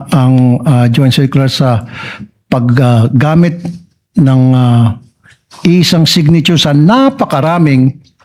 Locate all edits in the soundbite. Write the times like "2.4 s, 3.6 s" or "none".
none